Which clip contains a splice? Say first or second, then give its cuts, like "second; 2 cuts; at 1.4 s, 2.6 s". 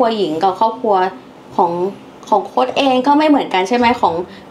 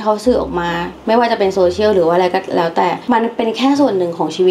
second; 1 cut; at 3.0 s